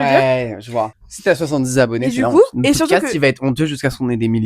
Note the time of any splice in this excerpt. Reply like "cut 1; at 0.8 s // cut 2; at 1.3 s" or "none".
cut 1; at 1.0 s